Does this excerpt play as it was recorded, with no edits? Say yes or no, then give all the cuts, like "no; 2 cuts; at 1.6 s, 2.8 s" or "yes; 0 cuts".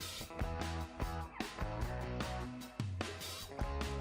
yes; 0 cuts